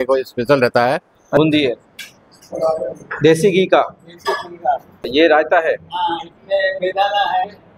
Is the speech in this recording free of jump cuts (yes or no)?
no